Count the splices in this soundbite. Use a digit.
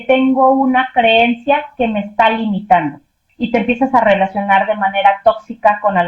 1